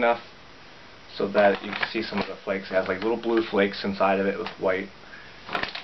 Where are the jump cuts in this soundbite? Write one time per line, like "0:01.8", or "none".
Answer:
none